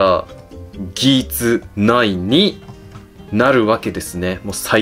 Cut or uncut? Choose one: uncut